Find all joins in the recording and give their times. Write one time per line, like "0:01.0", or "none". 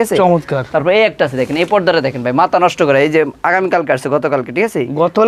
none